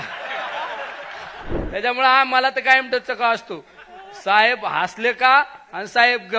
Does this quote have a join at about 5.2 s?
no; 1 cut; at 1.5 s

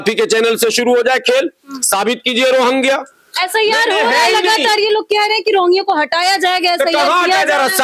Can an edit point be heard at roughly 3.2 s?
no; 0 cuts

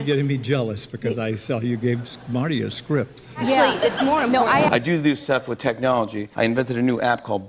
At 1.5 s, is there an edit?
no; 2 cuts; at 4.7 s, 6.2 s

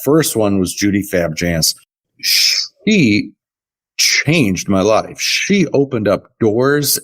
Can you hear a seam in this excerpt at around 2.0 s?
yes; 1 cut; at 2.0 s

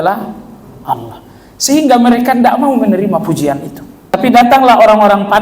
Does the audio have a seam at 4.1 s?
yes; 1 cut; at 4.1 s

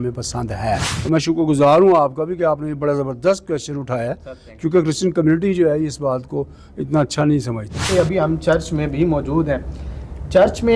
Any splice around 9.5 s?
no; 2 cuts; at 0.9 s, 7.8 s

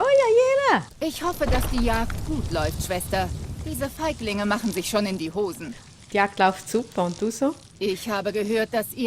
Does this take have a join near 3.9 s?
no; 2 cuts; at 0.9 s, 5.8 s

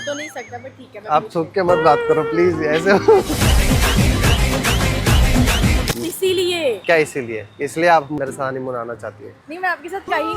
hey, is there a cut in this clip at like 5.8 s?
yes; 1 cut; at 5.8 s

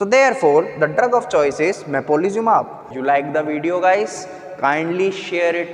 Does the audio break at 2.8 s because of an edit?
yes; 1 cut; at 2.8 s

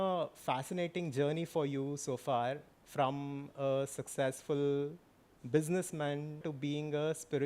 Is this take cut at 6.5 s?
yes; 1 cut; at 6.5 s

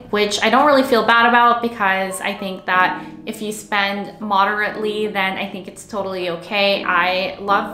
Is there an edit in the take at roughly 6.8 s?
yes; 1 cut; at 6.8 s

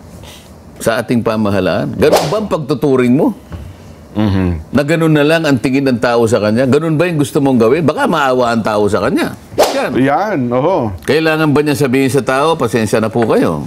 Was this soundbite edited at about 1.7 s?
no; 1 cut; at 9.7 s

